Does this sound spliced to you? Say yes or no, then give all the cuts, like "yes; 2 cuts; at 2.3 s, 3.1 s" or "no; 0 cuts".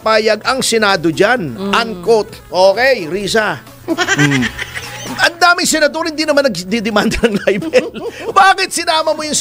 no; 0 cuts